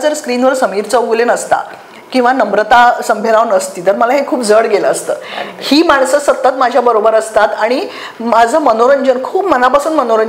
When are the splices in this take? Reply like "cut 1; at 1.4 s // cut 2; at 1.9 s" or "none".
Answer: none